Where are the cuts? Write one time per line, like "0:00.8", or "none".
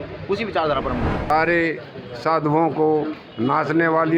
0:01.2